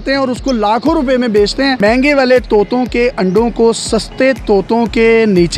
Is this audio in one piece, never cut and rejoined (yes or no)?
no